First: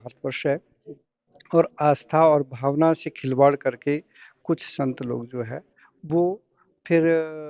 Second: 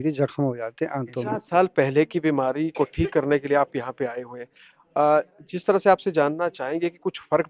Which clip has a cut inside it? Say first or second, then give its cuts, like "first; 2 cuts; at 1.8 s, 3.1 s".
second; 1 cut; at 1.2 s